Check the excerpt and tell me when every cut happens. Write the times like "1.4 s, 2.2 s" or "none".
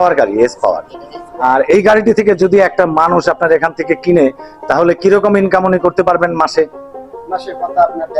1.4 s